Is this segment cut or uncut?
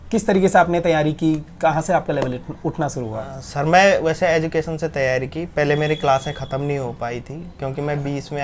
uncut